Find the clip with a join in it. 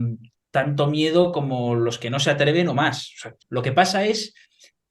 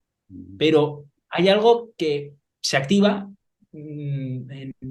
first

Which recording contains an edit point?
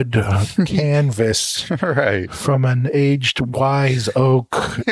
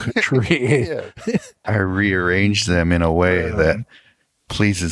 second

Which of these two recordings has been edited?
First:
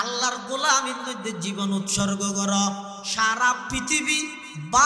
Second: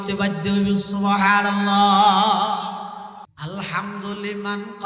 second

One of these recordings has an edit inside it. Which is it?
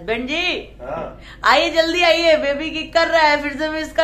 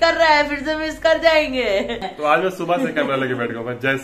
second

